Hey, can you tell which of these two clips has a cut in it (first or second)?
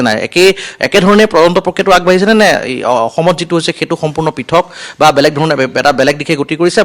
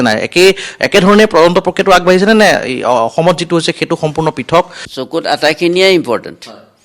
second